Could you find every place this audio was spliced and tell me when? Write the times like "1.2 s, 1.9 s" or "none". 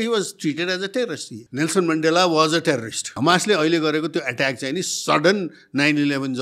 1.4 s, 3.1 s